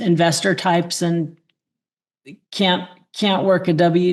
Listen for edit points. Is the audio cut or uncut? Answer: uncut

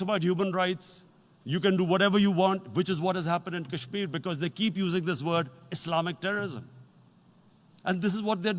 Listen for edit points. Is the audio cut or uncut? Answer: uncut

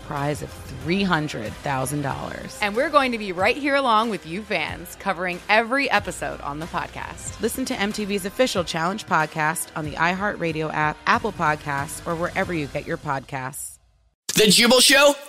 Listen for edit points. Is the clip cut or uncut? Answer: cut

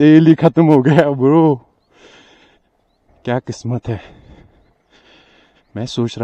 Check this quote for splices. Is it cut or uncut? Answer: uncut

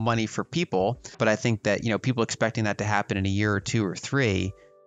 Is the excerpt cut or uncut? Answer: cut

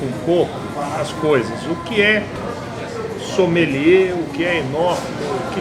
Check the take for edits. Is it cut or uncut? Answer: uncut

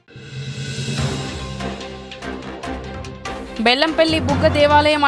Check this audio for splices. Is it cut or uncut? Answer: cut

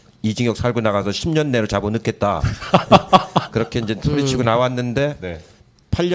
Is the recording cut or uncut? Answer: cut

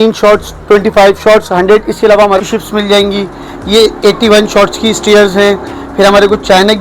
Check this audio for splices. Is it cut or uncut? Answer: cut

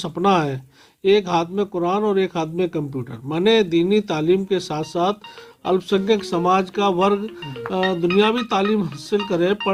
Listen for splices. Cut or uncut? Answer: uncut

